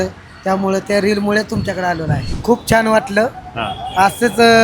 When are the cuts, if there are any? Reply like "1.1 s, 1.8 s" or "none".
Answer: 2.3 s